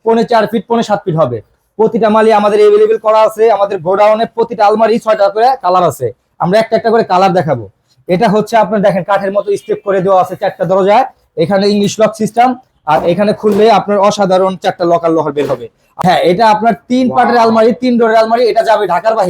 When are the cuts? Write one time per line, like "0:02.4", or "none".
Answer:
0:16.0